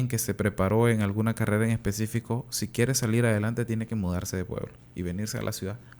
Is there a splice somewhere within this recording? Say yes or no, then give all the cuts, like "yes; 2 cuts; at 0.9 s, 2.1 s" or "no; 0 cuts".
no; 0 cuts